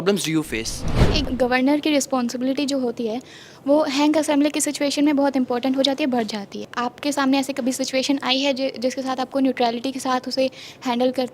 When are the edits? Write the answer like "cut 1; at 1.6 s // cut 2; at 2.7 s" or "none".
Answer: cut 1; at 1.1 s // cut 2; at 6.7 s